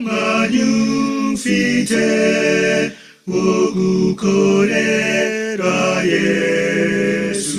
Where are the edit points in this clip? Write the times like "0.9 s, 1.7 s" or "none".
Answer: 5.5 s